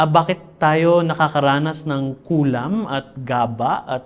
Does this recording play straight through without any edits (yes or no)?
yes